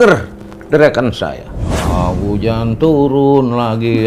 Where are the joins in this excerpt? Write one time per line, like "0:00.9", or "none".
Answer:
0:01.8